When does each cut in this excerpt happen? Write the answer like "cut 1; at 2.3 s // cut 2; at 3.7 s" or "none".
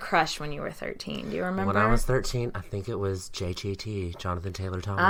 none